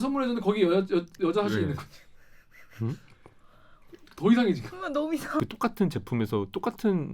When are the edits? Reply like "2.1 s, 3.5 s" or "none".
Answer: 5.4 s

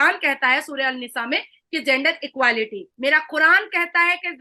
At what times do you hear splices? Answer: 2.9 s

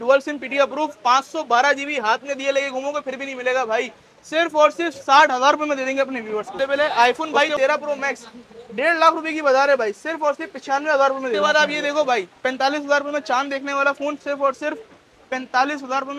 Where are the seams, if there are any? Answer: 6.6 s, 11.4 s

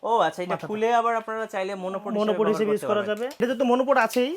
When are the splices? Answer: 3.4 s

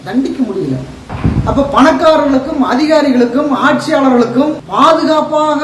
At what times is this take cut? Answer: 1.0 s, 4.6 s

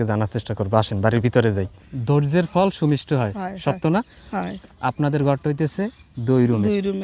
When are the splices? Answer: 1.8 s, 4.6 s

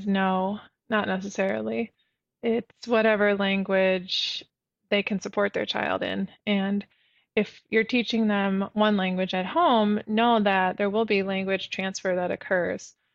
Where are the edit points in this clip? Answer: none

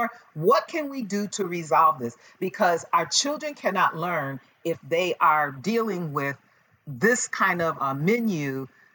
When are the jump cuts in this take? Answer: 7.8 s

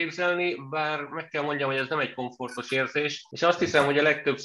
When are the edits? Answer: 3.2 s

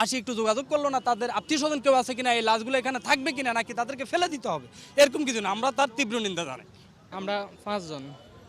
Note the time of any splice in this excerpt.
none

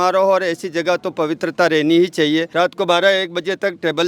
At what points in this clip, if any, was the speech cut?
2.5 s

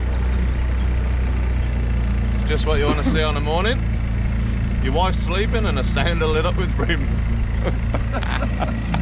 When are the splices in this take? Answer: none

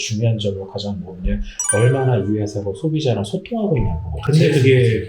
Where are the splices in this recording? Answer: 4.1 s

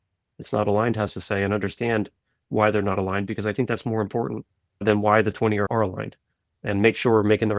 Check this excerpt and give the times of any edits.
4.8 s, 5.7 s

